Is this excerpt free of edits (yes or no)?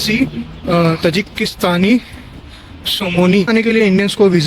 no